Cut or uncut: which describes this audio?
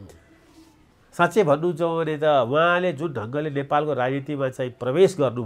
uncut